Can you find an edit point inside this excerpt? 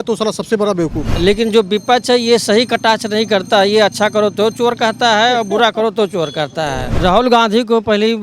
yes; 2 cuts; at 1.0 s, 7.0 s

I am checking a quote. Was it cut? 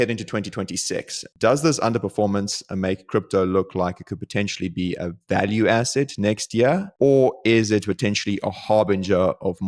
no; 0 cuts

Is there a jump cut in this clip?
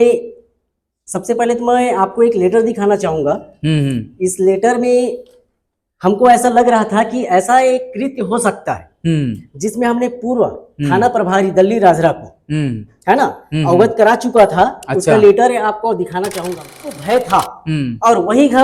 yes; 1 cut; at 16.9 s

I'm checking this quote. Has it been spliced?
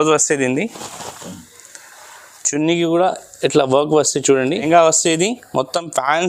yes; 1 cut; at 4.6 s

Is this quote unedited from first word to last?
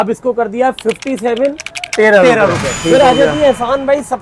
no; 1 cut; at 2.8 s

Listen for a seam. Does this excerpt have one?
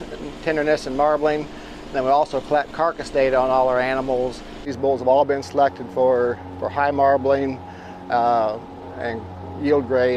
yes; 1 cut; at 4.7 s

